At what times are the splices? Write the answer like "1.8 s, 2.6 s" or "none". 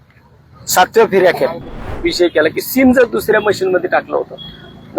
1.9 s